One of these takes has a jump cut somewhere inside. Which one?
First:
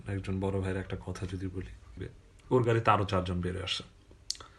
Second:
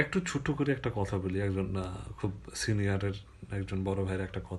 first; 1 cut; at 2.1 s

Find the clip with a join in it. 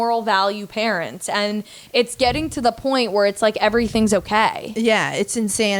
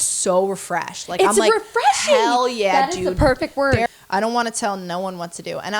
second; 1 cut; at 3.9 s

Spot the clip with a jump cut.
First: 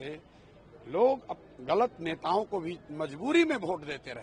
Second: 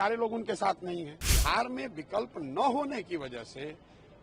second; 1 cut; at 1.2 s

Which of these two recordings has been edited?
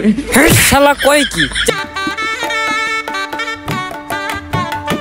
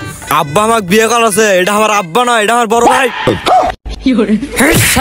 first; 1 cut; at 1.7 s

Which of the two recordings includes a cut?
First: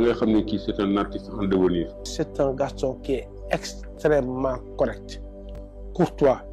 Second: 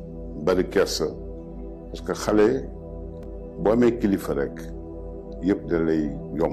first; 1 cut; at 2.2 s

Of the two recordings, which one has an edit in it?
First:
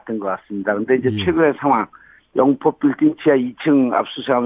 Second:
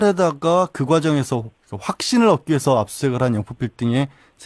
second; 1 cut; at 3.1 s

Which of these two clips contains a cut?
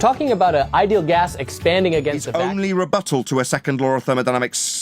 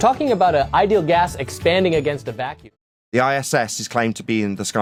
first; 1 cut; at 2.3 s

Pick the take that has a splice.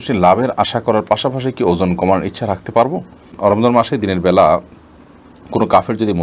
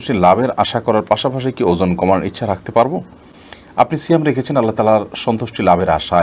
first; 1 cut; at 3.3 s

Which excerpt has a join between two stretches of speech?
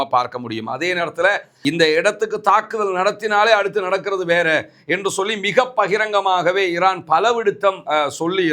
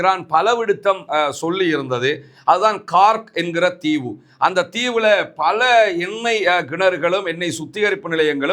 first; 1 cut; at 1.5 s

